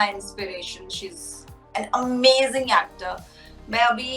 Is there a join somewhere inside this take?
no; 0 cuts

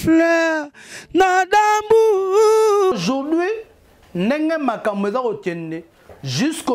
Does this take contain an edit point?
yes; 1 cut; at 3.0 s

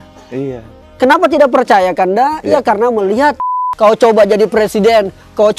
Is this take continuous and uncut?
no; 1 cut; at 3.5 s

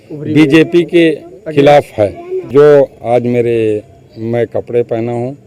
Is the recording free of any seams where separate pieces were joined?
no; 1 cut; at 2.5 s

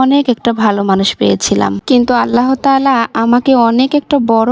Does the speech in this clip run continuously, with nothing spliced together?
yes; 0 cuts

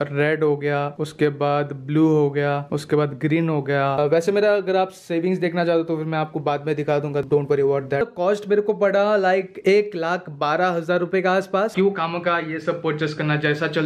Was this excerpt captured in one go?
no; 3 cuts; at 3.9 s, 8.1 s, 11.7 s

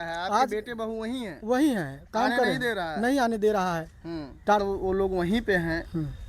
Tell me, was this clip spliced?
yes; 1 cut; at 4.6 s

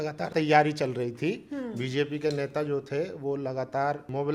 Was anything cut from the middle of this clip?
no; 0 cuts

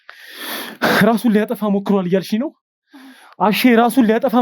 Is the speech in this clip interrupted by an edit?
no; 0 cuts

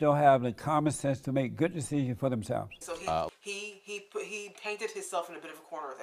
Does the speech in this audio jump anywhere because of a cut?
yes; 1 cut; at 3.3 s

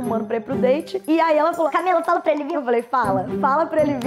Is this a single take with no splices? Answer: yes; 0 cuts

